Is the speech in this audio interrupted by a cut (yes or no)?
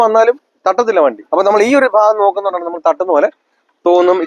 yes